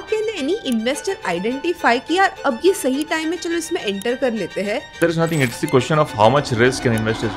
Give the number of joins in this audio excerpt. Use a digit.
1